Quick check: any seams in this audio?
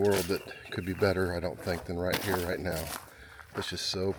no; 0 cuts

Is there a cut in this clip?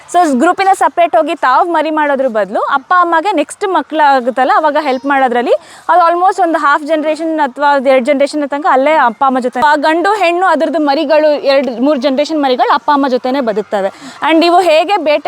yes; 1 cut; at 9.6 s

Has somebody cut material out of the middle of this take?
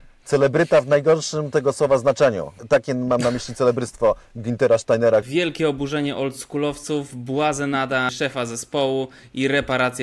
yes; 3 cuts; at 2.5 s, 5.3 s, 8.1 s

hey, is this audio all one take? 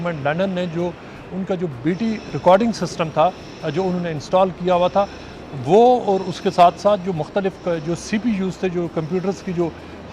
yes; 0 cuts

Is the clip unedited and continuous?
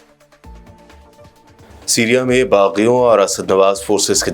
no; 1 cut; at 1.6 s

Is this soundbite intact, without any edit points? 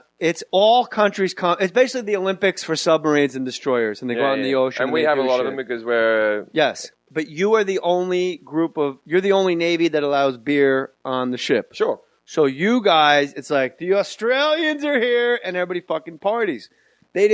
yes; 0 cuts

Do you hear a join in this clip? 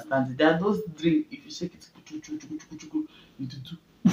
no; 0 cuts

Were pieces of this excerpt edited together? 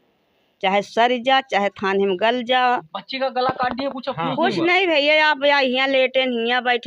yes; 1 cut; at 3.0 s

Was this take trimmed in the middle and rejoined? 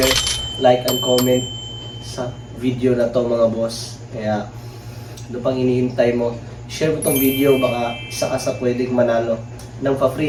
no; 0 cuts

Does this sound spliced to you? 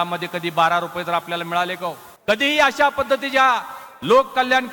yes; 1 cut; at 2.1 s

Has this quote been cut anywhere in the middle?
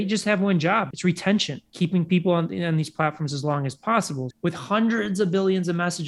yes; 3 cuts; at 0.9 s, 1.6 s, 4.2 s

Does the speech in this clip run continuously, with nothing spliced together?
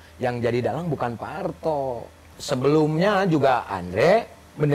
no; 1 cut; at 2.3 s

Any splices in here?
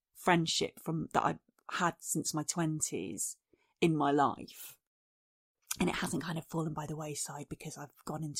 no; 0 cuts

